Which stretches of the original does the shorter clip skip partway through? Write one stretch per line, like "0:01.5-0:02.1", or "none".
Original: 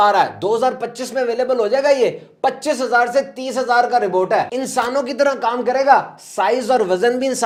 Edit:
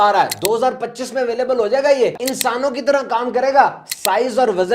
0:02.3-0:04.6